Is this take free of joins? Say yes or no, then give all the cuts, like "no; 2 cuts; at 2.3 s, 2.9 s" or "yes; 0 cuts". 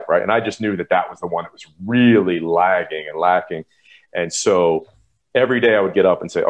yes; 0 cuts